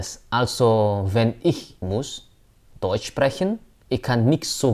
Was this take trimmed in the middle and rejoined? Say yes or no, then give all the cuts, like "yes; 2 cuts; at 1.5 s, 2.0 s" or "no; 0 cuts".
yes; 2 cuts; at 1.7 s, 3.7 s